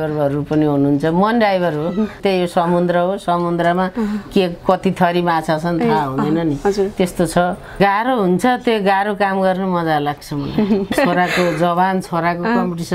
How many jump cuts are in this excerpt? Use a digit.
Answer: 3